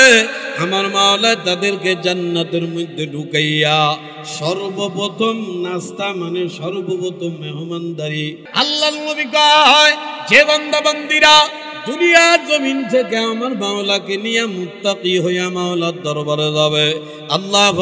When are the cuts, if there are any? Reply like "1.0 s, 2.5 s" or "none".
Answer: 8.4 s

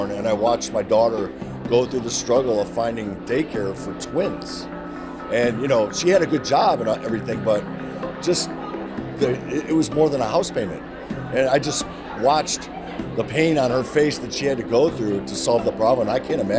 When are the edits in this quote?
none

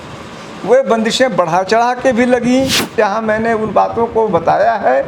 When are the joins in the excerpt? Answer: 2.9 s

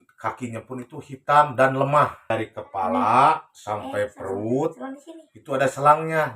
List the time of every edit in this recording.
2.3 s

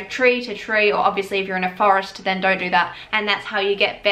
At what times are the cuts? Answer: 3.0 s

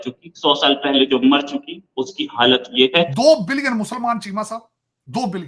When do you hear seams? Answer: 3.1 s

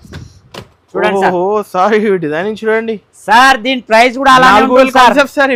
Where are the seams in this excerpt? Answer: none

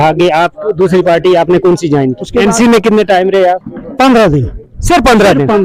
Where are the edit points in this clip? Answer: 2.3 s, 3.8 s

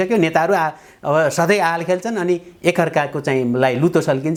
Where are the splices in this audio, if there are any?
none

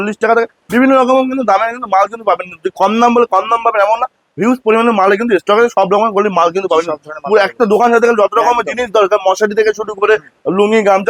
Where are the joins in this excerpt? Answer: none

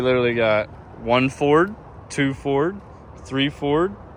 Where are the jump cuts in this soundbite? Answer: none

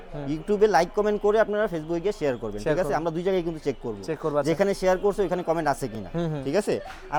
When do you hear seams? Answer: none

